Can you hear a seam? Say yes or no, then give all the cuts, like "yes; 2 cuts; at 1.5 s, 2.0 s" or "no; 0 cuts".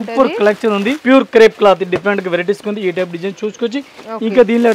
yes; 1 cut; at 1.0 s